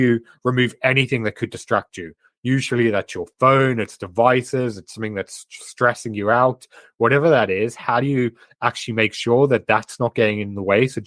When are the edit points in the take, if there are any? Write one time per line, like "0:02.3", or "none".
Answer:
none